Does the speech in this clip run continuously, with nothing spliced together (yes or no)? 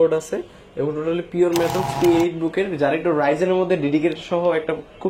no